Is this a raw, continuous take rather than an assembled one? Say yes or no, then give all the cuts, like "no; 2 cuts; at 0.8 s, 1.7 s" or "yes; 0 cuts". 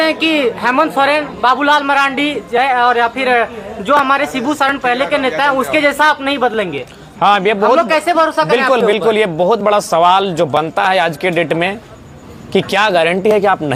yes; 0 cuts